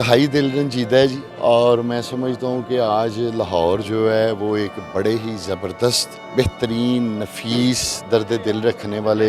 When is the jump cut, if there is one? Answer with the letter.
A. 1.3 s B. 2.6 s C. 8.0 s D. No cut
A